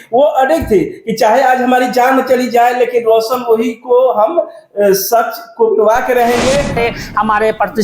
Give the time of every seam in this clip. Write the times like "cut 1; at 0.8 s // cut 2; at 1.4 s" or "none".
cut 1; at 6.8 s